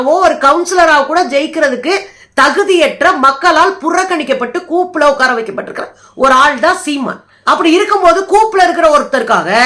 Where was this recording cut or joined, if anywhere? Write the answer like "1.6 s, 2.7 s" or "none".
none